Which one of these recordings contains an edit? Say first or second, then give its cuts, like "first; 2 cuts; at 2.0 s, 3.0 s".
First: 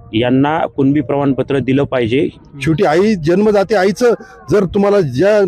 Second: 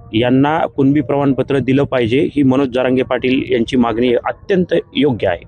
first; 1 cut; at 2.3 s